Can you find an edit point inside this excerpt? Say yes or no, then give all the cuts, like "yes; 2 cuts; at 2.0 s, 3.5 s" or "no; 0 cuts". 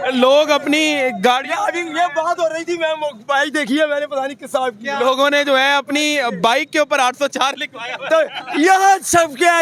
no; 0 cuts